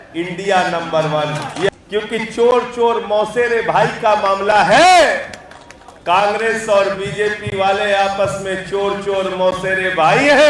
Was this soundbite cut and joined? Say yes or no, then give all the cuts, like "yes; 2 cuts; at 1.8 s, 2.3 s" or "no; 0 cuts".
yes; 1 cut; at 1.7 s